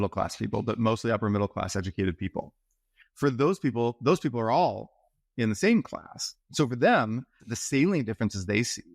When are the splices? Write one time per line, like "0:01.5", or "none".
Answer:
0:07.5